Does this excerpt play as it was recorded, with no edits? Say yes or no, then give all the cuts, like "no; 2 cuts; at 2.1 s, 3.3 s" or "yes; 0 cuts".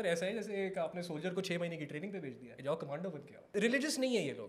no; 2 cuts; at 2.5 s, 3.4 s